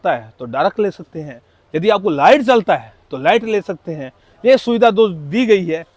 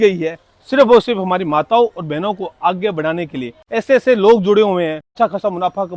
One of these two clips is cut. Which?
second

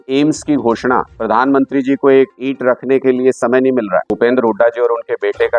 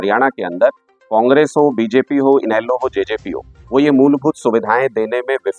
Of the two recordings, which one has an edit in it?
first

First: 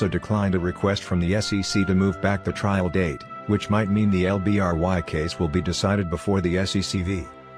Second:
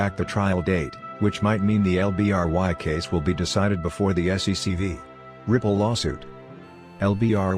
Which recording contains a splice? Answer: second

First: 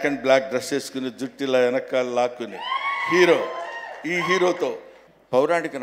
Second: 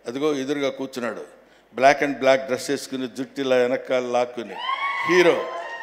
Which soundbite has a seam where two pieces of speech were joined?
first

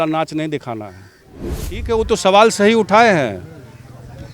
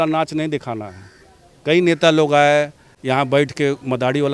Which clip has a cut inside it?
first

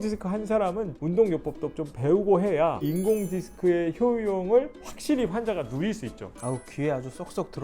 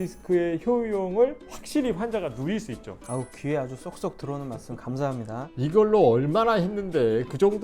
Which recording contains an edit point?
first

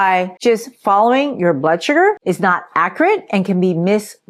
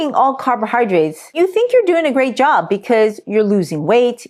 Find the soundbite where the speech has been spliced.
second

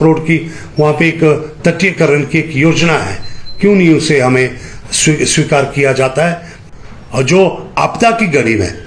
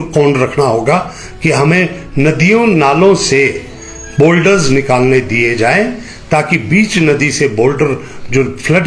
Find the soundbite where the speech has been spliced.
first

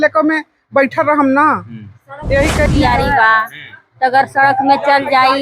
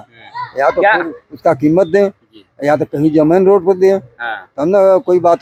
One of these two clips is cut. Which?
first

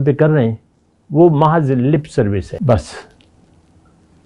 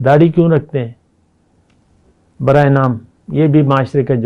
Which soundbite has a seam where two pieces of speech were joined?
first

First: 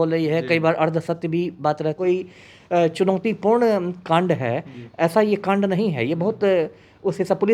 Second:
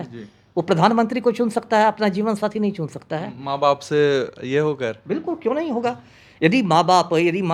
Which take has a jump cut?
first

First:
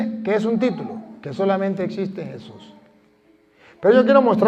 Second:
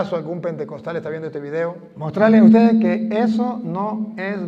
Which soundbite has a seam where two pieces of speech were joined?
second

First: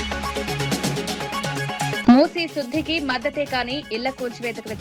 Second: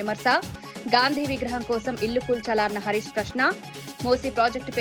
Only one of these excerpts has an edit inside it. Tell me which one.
first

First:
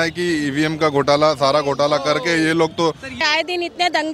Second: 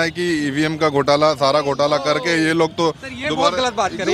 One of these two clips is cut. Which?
first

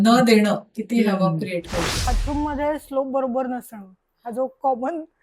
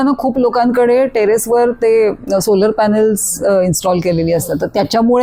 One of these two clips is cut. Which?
first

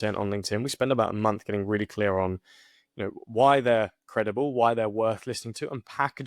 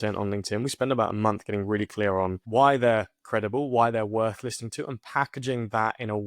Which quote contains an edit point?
second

